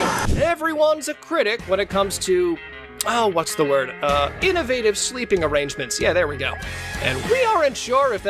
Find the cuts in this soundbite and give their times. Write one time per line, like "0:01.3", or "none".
none